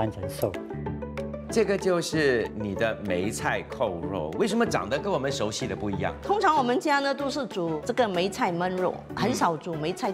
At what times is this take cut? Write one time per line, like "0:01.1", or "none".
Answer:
0:01.1
0:02.6
0:06.2